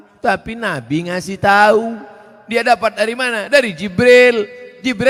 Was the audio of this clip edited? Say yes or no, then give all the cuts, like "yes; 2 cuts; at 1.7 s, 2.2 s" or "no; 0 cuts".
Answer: no; 0 cuts